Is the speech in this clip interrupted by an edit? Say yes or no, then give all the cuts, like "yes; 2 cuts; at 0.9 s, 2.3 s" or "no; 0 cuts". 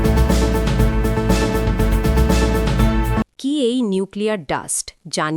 no; 0 cuts